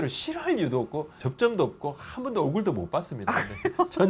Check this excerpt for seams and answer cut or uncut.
cut